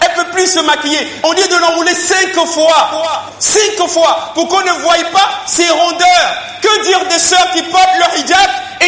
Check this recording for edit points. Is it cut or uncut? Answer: cut